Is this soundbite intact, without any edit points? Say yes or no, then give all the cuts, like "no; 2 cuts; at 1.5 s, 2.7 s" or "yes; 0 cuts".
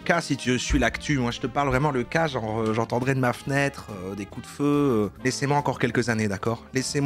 yes; 0 cuts